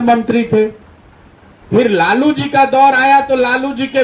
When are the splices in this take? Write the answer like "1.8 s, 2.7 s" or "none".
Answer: none